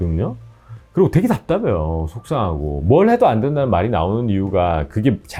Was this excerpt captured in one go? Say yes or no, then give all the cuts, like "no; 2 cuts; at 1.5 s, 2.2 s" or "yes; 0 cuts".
yes; 0 cuts